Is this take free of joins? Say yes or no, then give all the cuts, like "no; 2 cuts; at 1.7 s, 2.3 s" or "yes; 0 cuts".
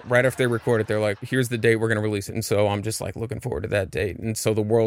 no; 2 cuts; at 1.2 s, 2.3 s